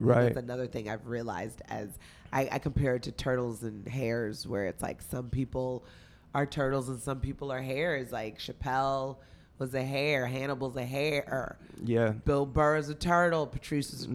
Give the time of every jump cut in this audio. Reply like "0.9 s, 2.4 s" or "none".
none